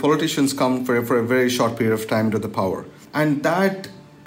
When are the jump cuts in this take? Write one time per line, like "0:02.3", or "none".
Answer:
0:03.0